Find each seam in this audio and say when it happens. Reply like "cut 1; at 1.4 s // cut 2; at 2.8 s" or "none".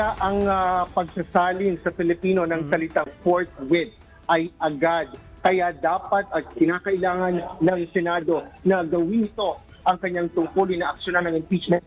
cut 1; at 10.8 s